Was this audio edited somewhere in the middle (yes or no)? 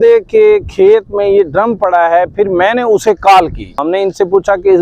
yes